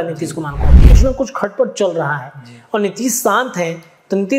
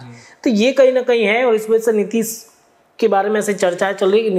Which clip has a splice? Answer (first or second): first